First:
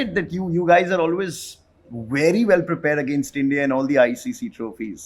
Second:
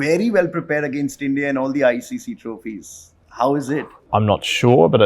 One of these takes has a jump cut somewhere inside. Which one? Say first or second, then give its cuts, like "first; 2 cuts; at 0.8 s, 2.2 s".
second; 1 cut; at 4.0 s